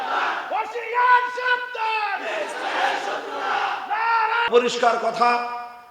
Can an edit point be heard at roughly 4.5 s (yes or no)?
yes